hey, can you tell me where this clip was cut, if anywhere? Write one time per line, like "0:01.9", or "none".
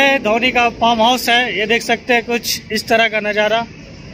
0:02.5